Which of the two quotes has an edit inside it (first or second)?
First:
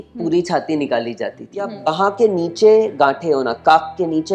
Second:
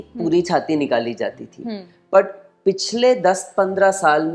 first